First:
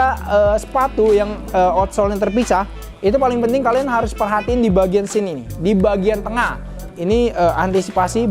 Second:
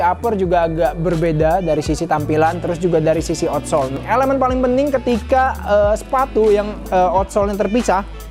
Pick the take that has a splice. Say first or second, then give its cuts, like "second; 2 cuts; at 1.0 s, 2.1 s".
second; 1 cut; at 4.0 s